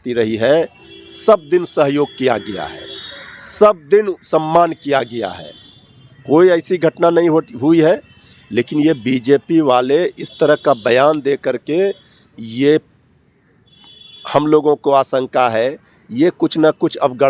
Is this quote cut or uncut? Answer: uncut